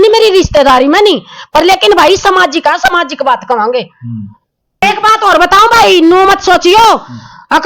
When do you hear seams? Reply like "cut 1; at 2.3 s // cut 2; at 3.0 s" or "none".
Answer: cut 1; at 4.8 s